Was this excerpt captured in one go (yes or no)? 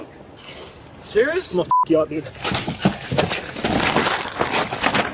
yes